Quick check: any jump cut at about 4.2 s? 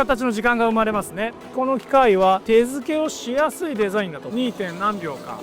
yes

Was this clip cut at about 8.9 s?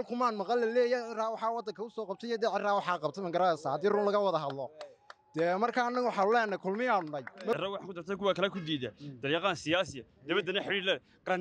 no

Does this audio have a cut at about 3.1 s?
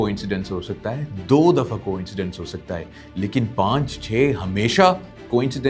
no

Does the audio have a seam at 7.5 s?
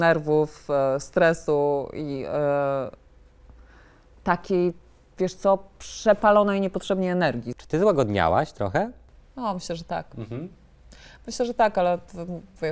yes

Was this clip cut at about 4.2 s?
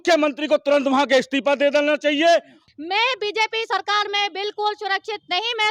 no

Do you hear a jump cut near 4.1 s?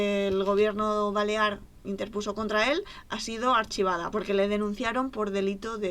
yes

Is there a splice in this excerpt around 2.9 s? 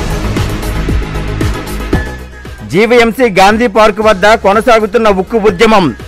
no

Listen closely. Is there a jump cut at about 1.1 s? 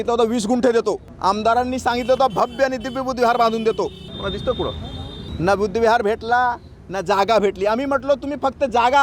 yes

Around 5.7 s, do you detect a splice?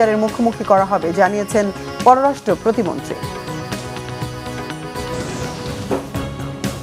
yes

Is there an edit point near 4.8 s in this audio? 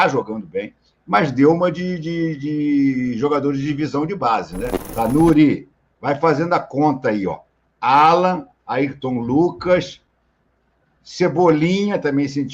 yes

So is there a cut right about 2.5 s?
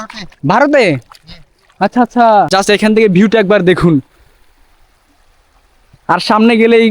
yes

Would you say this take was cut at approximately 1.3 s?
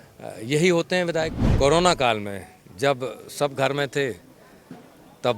yes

